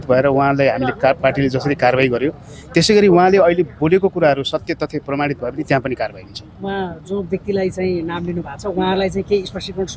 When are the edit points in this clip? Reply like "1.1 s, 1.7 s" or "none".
none